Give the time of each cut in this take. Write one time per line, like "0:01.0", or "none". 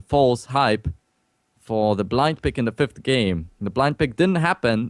none